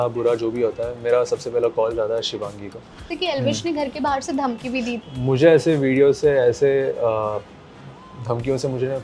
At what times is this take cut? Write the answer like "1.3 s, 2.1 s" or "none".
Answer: 3.0 s, 5.0 s